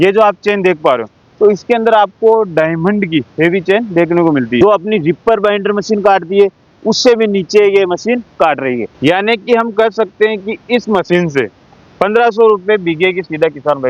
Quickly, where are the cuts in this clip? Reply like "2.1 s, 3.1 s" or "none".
4.6 s, 8.9 s